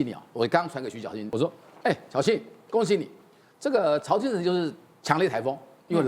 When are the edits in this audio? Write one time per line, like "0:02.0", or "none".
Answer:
0:01.3